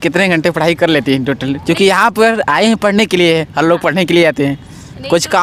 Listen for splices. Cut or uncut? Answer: uncut